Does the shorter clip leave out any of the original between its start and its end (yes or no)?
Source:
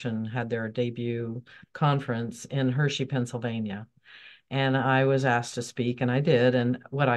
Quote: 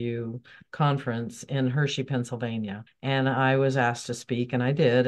yes